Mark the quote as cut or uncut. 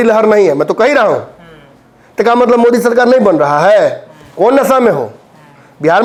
uncut